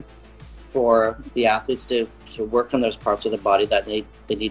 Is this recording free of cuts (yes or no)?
yes